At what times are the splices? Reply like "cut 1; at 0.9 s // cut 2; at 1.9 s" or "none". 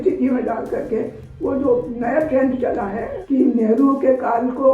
cut 1; at 3.1 s